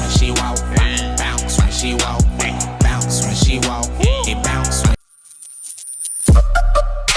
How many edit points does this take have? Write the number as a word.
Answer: zero